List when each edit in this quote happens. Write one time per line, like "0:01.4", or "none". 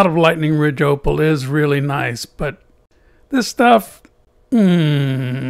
none